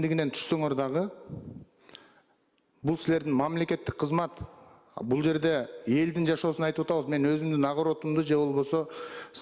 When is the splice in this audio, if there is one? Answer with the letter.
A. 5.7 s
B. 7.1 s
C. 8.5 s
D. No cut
D